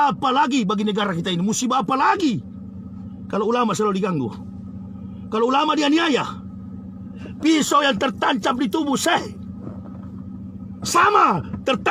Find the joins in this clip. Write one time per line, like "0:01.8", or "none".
none